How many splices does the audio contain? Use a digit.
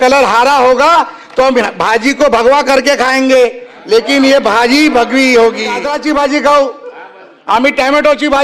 1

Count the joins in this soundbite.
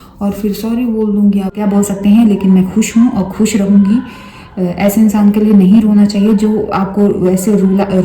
1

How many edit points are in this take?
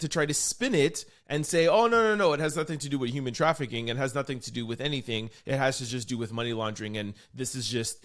0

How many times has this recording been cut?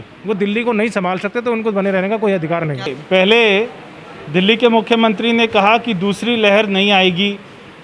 1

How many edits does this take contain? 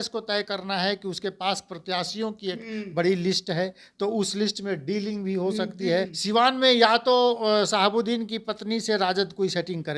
1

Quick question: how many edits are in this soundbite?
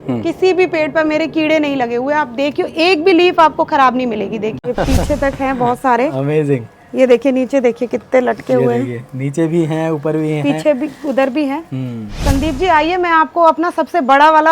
2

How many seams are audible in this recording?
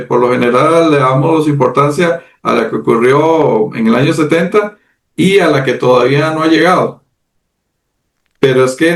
0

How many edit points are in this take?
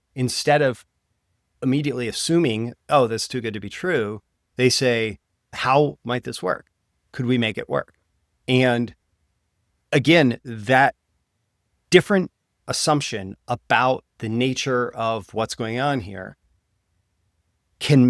1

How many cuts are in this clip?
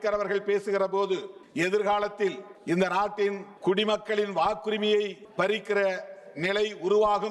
4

